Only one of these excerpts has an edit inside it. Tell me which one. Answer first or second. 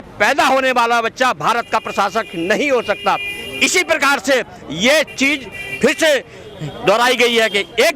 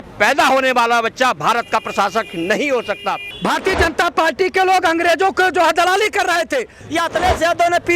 second